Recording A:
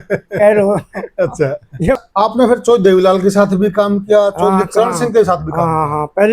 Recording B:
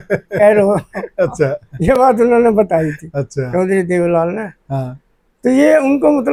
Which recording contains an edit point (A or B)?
A